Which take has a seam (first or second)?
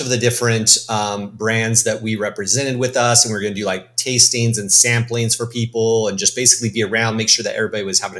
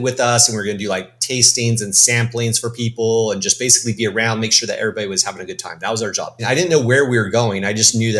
second